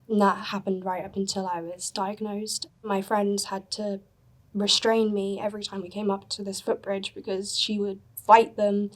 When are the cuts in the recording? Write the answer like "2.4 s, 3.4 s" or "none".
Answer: 2.8 s